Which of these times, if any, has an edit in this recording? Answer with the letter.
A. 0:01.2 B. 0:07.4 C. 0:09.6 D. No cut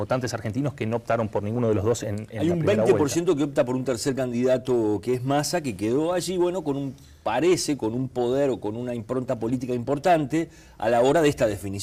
D